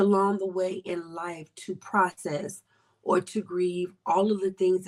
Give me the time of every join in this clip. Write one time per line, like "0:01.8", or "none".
none

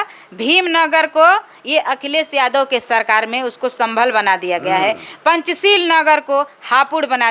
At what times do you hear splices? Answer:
none

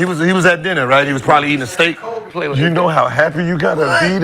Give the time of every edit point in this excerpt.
0:02.3

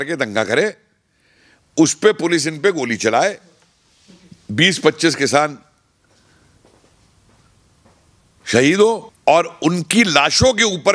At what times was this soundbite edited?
0:09.1

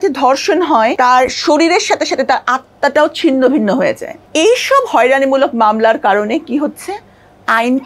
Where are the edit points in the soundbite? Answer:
0:00.9
0:04.2

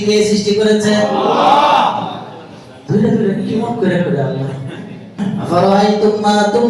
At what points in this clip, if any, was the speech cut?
0:05.2

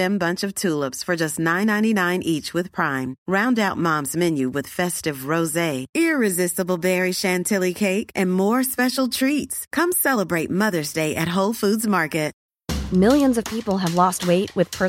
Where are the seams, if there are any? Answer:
0:12.4

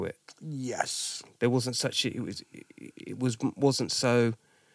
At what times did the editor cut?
none

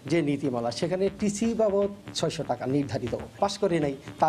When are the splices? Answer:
0:03.3

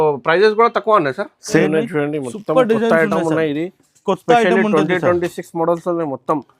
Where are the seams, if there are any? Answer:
0:01.6

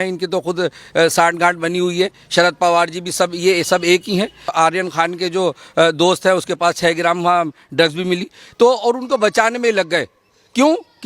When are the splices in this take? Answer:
0:04.5

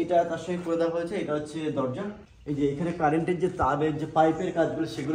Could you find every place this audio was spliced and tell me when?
0:02.2

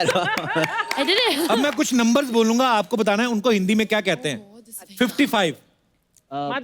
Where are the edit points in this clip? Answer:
0:01.5

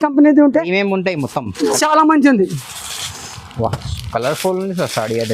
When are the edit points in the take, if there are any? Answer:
0:01.7

